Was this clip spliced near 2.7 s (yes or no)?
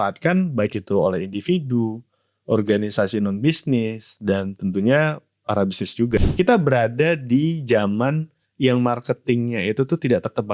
no